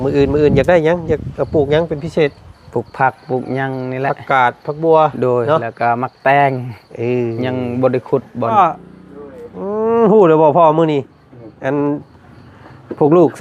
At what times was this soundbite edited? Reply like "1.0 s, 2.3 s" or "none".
8.5 s